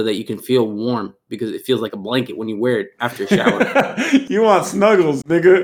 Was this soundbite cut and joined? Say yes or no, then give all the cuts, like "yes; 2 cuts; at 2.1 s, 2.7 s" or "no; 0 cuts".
yes; 1 cut; at 4.3 s